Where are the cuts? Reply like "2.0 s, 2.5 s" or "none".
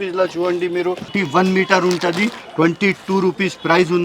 1.1 s